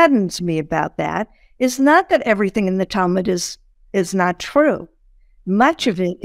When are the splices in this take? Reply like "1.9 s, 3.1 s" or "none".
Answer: none